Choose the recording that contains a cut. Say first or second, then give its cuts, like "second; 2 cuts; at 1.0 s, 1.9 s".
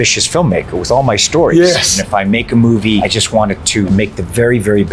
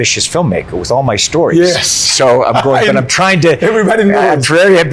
first; 2 cuts; at 2.0 s, 3.6 s